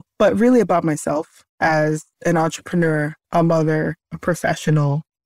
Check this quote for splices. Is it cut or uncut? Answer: uncut